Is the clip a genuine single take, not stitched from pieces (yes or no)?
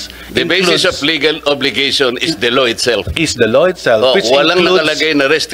yes